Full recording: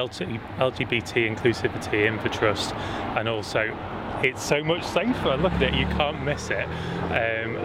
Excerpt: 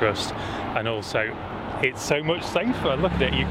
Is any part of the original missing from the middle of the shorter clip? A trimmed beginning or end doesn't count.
no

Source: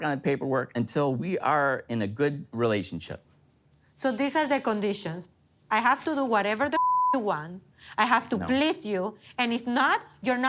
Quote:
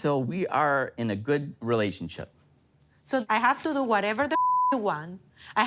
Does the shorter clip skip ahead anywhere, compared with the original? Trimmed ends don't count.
yes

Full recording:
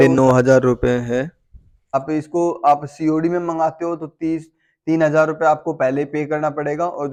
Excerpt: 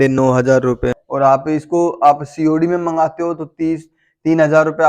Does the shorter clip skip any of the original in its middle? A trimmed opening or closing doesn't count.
yes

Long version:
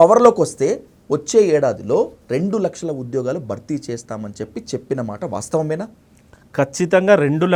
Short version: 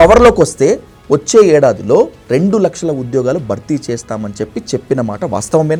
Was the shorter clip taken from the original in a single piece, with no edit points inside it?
yes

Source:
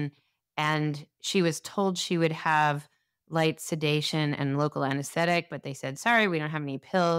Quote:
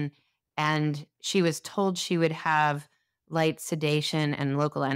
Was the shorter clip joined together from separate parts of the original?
no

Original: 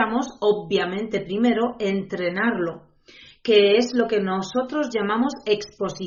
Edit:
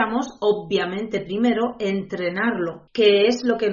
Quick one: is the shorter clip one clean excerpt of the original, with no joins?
no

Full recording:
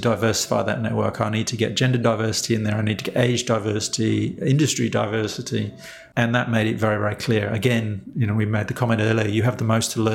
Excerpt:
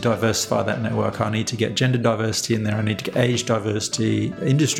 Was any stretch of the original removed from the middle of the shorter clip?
no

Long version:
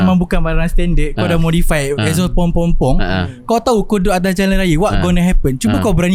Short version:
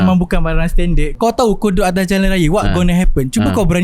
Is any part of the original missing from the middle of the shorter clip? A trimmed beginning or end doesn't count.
yes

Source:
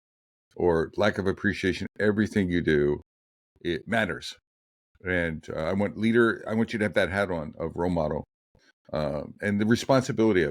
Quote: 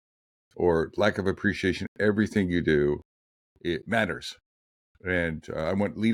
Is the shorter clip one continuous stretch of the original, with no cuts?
yes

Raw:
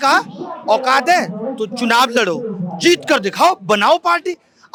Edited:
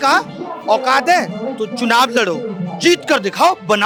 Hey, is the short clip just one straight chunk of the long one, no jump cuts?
yes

